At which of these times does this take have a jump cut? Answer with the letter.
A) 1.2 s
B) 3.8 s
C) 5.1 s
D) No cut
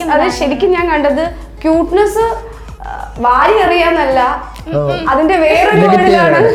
D